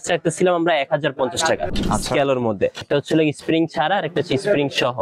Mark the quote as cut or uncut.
cut